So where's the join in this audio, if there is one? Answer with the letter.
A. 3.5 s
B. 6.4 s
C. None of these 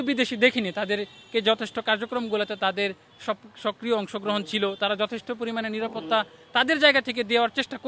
C